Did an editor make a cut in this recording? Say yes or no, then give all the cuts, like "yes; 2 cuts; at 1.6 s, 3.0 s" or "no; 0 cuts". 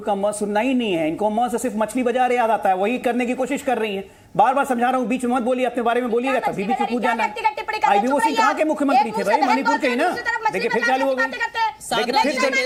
no; 0 cuts